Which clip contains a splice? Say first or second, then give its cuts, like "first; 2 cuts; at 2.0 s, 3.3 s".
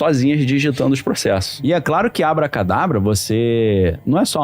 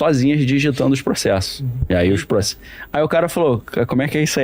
first; 1 cut; at 1.5 s